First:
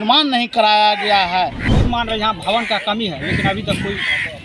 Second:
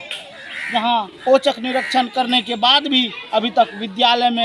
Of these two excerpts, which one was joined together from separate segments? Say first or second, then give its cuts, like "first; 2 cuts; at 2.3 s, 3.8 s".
first; 1 cut; at 1.7 s